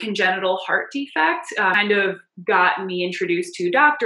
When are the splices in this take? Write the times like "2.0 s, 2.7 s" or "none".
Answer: 1.8 s